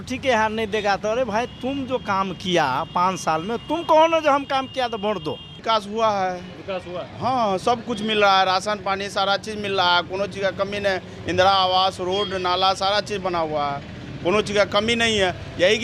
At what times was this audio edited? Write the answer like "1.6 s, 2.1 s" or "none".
5.6 s

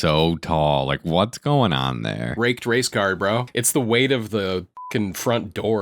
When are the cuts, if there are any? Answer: 2.3 s, 3.6 s, 4.7 s

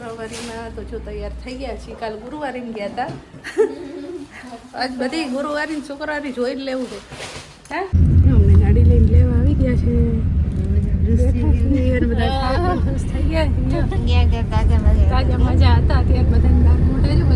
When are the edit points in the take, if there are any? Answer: none

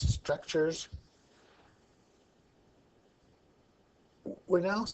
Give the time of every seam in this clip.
2.8 s

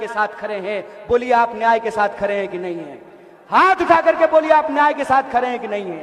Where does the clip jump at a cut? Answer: none

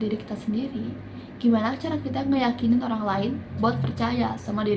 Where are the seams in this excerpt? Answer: none

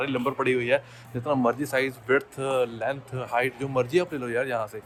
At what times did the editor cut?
none

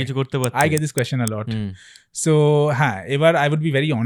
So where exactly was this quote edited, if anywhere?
none

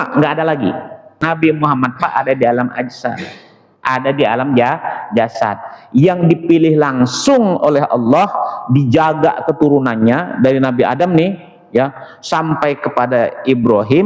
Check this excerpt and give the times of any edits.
1.2 s

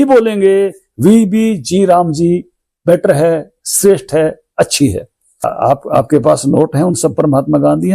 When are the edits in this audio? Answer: 5.4 s

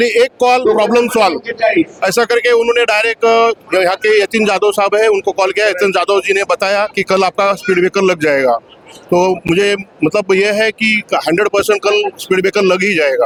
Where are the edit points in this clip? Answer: none

